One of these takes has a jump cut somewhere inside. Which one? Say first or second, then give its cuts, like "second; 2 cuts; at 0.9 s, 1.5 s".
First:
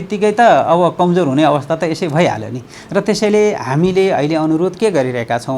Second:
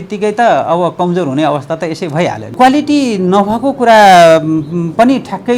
second; 1 cut; at 2.5 s